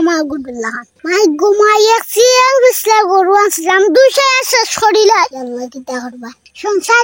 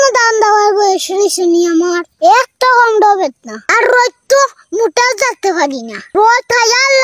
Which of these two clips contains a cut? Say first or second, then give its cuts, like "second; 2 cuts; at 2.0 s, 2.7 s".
first; 1 cut; at 5.4 s